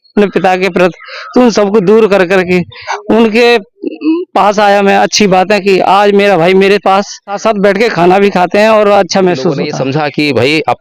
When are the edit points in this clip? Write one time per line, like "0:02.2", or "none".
0:07.3
0:09.7